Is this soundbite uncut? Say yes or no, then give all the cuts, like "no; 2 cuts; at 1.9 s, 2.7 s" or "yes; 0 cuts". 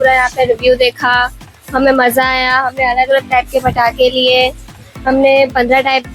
yes; 0 cuts